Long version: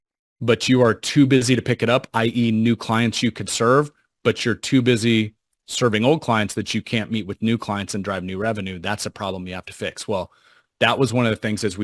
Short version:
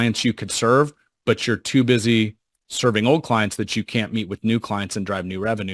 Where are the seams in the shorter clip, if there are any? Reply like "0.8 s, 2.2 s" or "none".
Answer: none